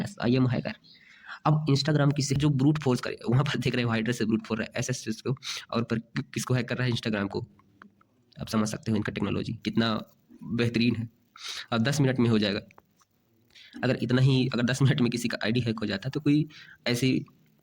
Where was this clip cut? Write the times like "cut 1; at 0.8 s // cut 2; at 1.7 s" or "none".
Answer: cut 1; at 2.3 s